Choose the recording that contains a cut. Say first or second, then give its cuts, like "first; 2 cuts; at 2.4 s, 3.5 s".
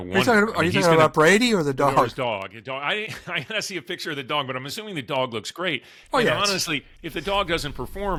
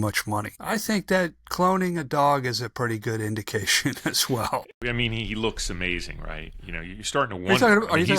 second; 1 cut; at 4.8 s